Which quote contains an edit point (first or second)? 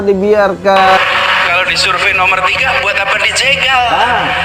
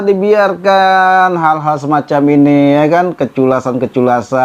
first